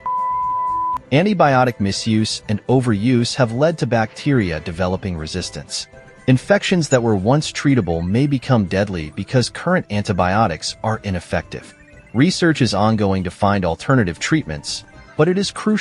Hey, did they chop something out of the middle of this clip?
yes; 1 cut; at 1.0 s

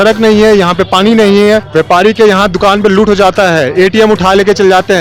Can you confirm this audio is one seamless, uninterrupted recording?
no; 1 cut; at 1.7 s

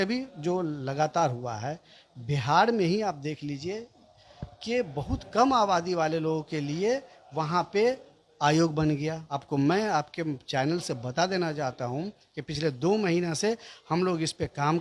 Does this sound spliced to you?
yes; 1 cut; at 9.3 s

